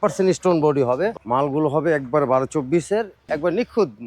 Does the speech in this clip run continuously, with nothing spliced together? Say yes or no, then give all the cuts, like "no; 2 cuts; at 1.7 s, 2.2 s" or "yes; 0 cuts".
no; 2 cuts; at 1.2 s, 3.2 s